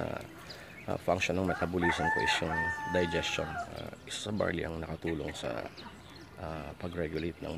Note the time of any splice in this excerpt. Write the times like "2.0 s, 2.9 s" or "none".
3.8 s